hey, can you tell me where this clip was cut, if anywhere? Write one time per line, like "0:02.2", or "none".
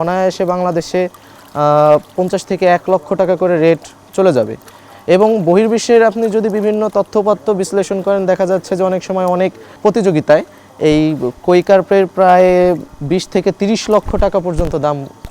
0:09.7
0:12.9